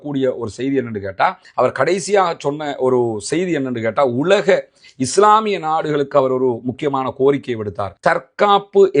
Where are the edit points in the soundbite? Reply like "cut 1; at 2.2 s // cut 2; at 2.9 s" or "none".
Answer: cut 1; at 1.4 s